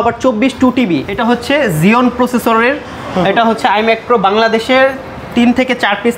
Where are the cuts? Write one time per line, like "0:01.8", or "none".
0:01.1